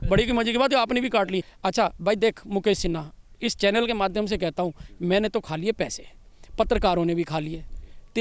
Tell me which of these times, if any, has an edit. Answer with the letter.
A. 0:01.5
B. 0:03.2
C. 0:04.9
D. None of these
A